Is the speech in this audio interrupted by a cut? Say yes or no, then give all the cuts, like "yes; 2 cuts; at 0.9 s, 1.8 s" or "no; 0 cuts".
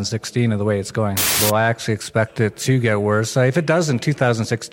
yes; 1 cut; at 1.3 s